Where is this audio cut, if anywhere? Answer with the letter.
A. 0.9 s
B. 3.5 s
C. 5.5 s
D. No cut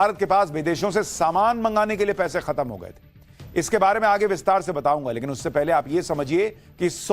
A